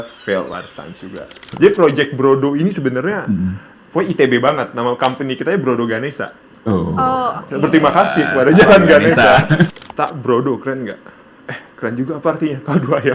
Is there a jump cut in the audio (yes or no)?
yes